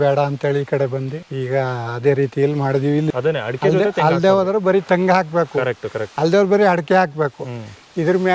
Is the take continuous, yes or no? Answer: no